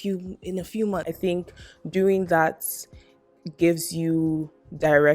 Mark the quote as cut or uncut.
cut